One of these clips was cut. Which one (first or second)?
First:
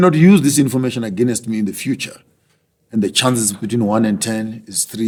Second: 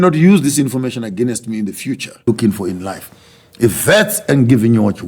second